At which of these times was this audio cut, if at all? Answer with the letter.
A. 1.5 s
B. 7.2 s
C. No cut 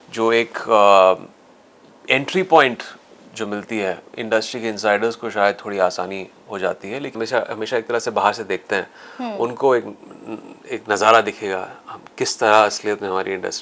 B